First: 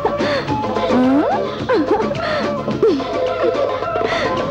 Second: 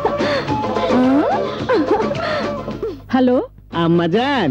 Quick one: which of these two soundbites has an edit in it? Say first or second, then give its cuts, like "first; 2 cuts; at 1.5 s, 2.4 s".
second; 1 cut; at 2.7 s